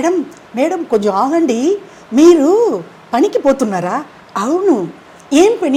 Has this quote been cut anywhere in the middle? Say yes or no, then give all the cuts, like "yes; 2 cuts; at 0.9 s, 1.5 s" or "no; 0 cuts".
no; 0 cuts